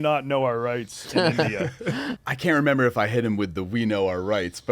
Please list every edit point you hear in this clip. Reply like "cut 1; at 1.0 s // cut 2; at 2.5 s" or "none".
cut 1; at 2.2 s